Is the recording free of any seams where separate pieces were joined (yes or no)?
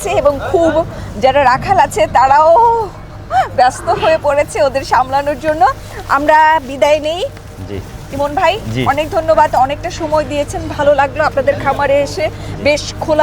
yes